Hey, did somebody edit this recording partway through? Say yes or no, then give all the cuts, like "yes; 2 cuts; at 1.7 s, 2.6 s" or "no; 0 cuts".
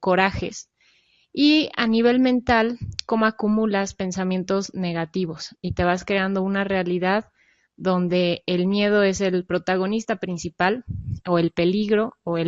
yes; 1 cut; at 7.3 s